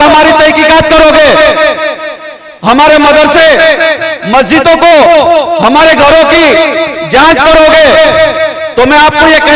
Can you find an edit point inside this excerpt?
no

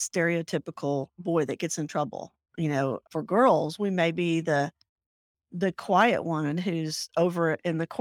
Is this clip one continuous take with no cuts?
no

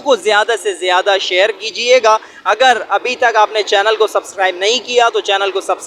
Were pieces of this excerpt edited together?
no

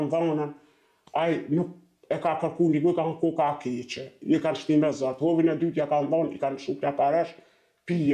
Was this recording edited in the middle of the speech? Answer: no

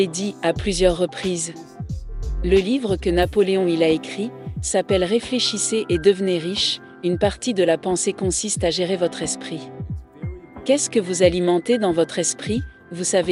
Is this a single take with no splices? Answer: yes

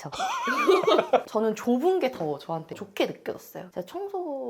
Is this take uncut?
no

